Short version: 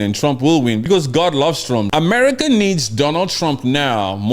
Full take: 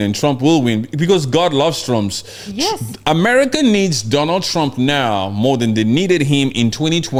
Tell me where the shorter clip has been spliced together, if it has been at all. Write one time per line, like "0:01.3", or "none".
0:00.8
0:01.9